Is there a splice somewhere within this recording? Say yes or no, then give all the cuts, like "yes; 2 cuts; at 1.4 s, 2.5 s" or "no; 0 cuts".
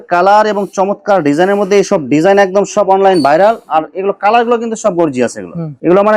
no; 0 cuts